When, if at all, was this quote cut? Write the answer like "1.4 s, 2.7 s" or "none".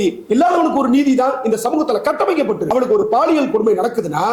2.7 s